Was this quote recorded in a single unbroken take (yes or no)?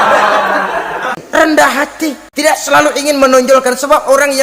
no